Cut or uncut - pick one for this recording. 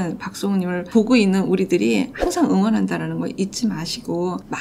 uncut